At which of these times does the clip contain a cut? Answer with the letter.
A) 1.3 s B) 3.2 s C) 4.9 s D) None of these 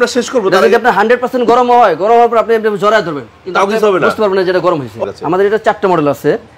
C